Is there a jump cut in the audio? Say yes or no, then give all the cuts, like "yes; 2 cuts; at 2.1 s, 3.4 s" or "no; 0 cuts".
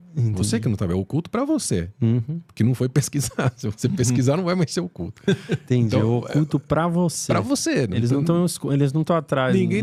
no; 0 cuts